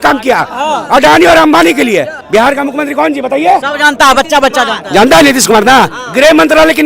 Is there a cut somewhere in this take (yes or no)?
yes